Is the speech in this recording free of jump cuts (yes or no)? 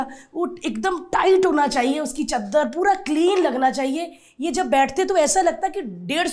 yes